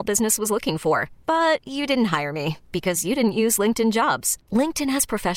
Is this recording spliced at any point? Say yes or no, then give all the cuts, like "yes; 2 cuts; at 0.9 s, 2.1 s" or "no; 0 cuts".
no; 0 cuts